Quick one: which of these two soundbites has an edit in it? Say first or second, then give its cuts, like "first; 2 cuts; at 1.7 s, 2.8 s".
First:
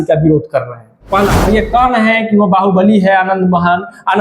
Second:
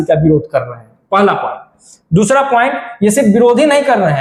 first; 1 cut; at 1.5 s